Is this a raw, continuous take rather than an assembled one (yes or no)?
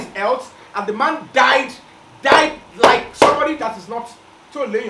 yes